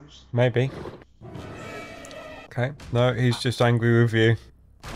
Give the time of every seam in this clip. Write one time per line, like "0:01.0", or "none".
0:02.8